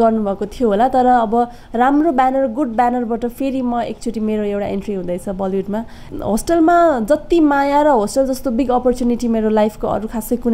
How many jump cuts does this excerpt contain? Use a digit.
1